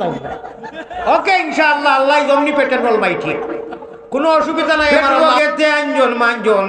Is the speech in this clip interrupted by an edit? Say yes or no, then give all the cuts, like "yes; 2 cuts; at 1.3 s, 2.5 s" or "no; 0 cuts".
yes; 1 cut; at 5.3 s